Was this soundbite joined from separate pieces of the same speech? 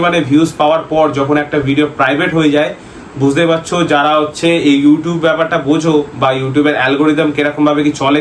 no; 0 cuts

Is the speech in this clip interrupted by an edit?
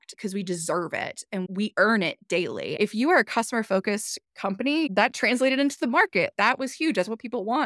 no; 0 cuts

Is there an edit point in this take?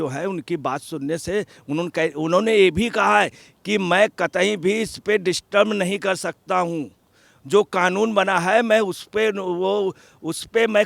no; 0 cuts

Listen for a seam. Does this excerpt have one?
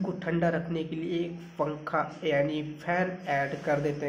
no; 0 cuts

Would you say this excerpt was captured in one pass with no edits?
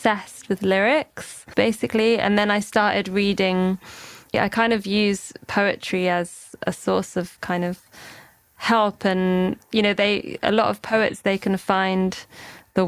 no; 3 cuts; at 1.3 s, 4.3 s, 6.5 s

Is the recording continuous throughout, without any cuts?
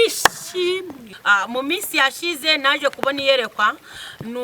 no; 1 cut; at 1.1 s

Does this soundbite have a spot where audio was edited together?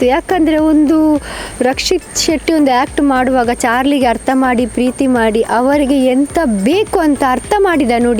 no; 0 cuts

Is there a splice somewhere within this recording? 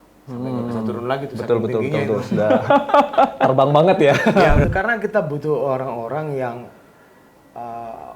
yes; 1 cut; at 4.6 s

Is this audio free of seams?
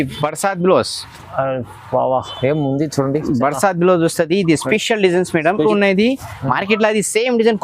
no; 1 cut; at 5.7 s

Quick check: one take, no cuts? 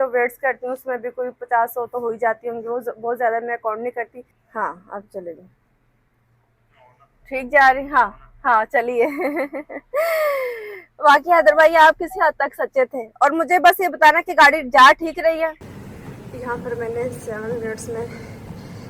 no; 2 cuts; at 4.4 s, 15.7 s

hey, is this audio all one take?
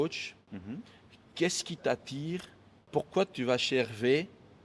no; 1 cut; at 2.8 s

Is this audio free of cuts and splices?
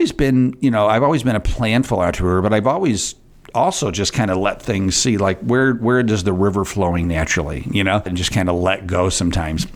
yes; 0 cuts

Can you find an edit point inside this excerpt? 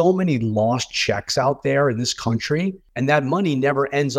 yes; 1 cut; at 2.8 s

